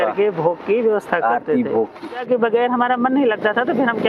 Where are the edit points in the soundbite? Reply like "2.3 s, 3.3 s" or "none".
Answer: 2.2 s